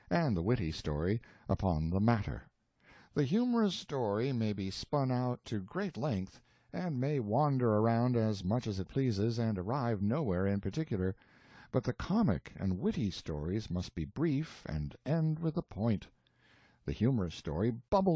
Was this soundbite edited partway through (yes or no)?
no